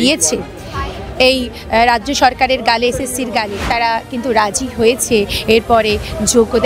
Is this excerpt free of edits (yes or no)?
no